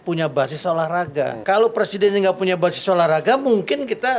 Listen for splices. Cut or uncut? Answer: cut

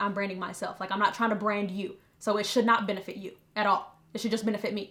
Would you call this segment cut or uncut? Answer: uncut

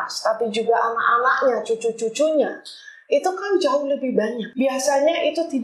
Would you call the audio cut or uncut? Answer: cut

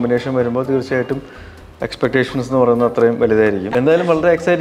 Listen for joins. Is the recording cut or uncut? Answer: cut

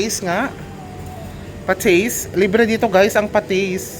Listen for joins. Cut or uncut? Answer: uncut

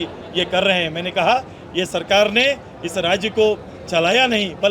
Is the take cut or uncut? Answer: uncut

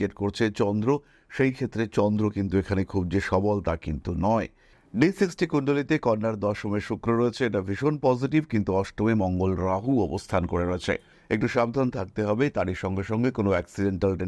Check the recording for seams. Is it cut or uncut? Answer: cut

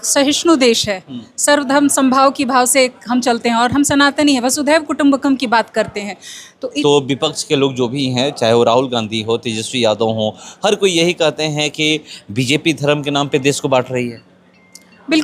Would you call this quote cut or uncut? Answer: cut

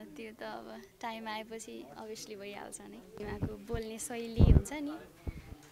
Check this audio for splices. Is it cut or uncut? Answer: cut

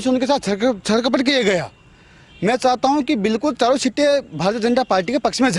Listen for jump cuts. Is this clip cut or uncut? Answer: uncut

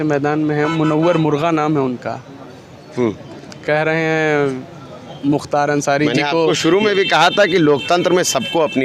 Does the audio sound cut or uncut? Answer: uncut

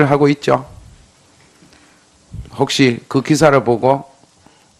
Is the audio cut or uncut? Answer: uncut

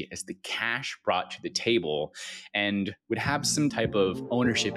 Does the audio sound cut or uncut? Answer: cut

